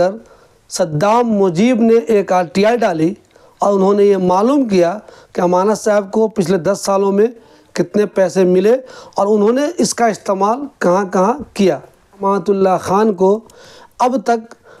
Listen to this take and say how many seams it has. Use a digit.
1